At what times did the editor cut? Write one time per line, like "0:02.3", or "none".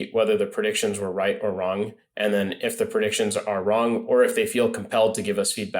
none

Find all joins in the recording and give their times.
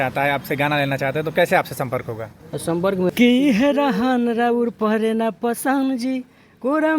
0:03.1

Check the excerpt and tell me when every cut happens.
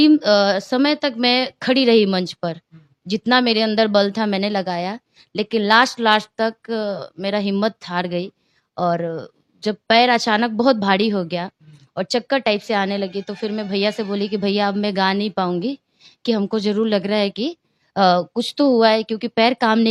none

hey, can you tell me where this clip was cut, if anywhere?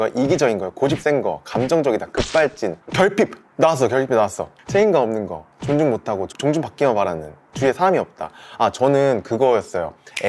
none

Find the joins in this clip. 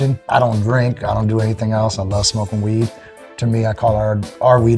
none

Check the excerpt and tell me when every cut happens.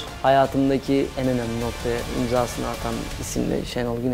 0:01.1

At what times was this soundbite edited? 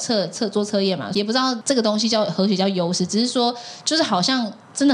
0:01.2

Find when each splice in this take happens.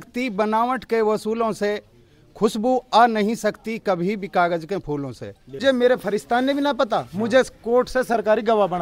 0:05.6

